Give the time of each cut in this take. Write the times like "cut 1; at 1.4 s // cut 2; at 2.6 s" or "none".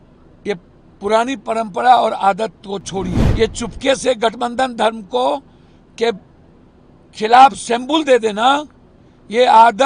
cut 1; at 3.2 s